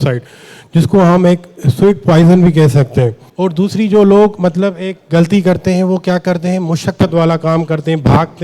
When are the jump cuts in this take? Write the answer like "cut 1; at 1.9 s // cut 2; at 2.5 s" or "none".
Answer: cut 1; at 3.2 s